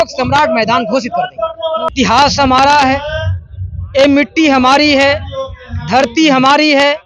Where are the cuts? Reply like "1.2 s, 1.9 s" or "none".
1.9 s